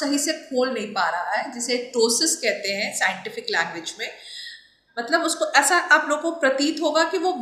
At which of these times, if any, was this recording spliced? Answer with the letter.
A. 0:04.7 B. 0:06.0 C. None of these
C